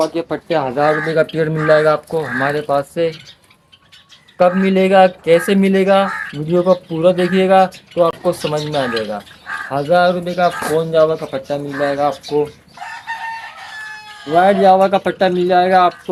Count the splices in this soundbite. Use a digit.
0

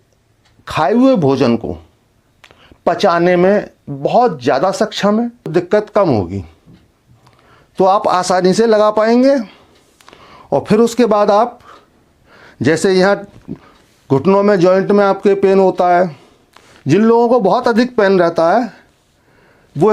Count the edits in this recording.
1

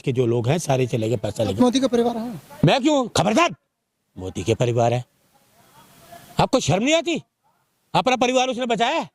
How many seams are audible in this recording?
1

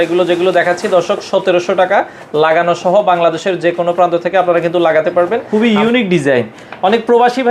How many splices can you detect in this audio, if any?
1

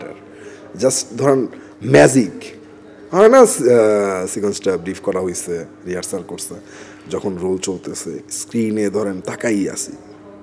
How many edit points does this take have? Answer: 0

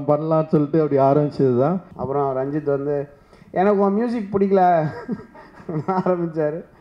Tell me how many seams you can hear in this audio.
1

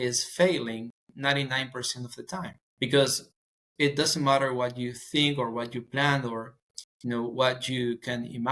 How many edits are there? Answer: 1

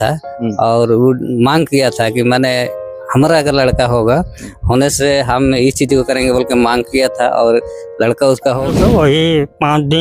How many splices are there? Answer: 1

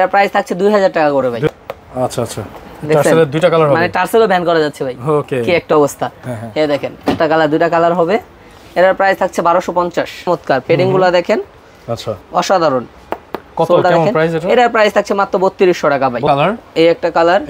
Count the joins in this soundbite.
3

